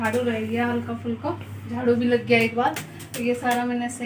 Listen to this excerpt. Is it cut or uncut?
uncut